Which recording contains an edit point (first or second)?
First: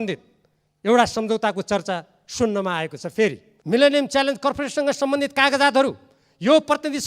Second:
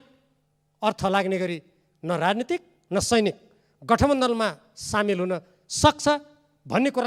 first